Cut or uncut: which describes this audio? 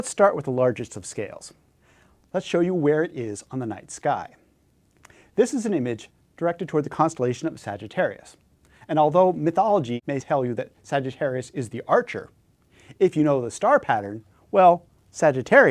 cut